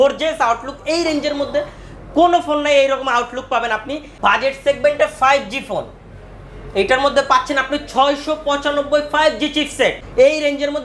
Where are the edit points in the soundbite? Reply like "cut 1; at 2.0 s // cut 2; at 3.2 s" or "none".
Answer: cut 1; at 4.0 s // cut 2; at 10.0 s

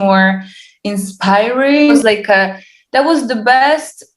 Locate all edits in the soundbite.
cut 1; at 2.0 s

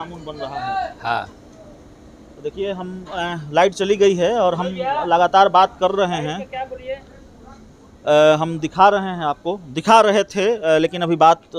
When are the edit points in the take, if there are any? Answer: none

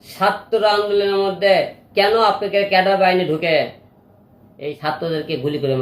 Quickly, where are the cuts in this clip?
cut 1; at 4.8 s

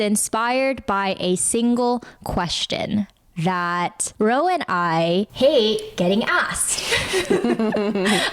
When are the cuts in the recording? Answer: none

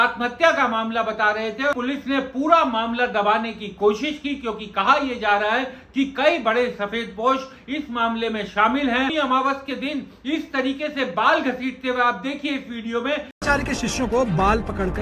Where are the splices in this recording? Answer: cut 1; at 1.7 s // cut 2; at 9.1 s // cut 3; at 13.3 s

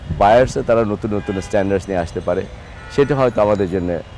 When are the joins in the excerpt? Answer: none

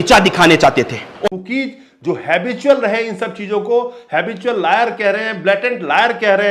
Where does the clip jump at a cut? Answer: cut 1; at 1.0 s

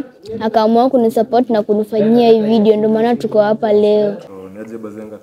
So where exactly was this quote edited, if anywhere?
cut 1; at 4.3 s

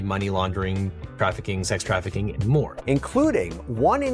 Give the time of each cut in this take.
cut 1; at 2.8 s

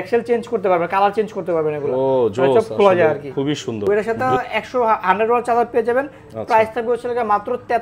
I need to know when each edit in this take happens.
cut 1; at 3.9 s

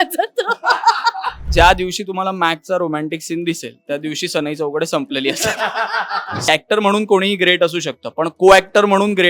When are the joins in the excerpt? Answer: cut 1; at 1.4 s // cut 2; at 6.5 s

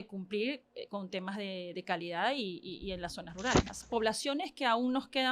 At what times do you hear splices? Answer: cut 1; at 3.8 s

